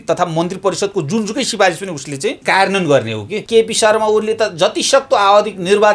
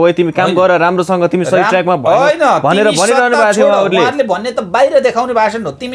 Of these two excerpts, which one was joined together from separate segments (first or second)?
first